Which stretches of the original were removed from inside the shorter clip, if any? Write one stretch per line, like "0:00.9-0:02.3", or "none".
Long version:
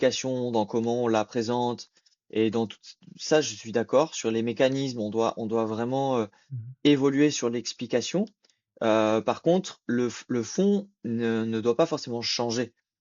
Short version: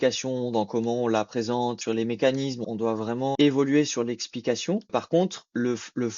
0:01.8-0:04.2
0:05.3-0:06.4
0:08.4-0:09.2